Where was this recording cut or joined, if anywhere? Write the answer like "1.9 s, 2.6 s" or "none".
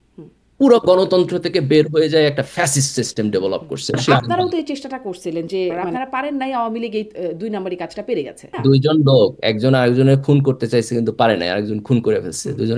4.0 s, 5.8 s, 8.5 s